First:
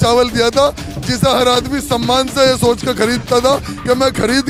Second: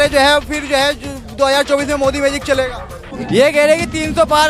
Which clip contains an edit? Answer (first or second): second